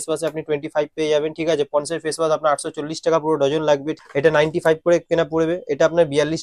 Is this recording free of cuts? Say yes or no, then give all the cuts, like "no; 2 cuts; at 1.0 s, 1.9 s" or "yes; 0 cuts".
no; 1 cut; at 3.9 s